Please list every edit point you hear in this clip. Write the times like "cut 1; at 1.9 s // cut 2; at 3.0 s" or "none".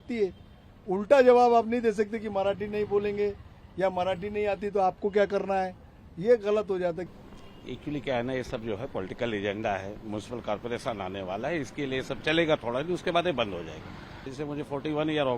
cut 1; at 7.2 s // cut 2; at 14.3 s